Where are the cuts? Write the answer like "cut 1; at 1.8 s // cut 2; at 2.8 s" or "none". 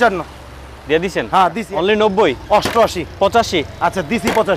cut 1; at 1.5 s